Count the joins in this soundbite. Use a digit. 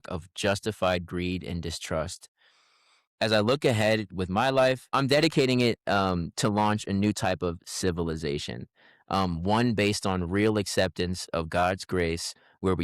1